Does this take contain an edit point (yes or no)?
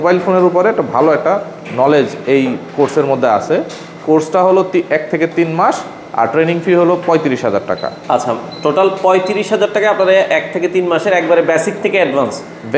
no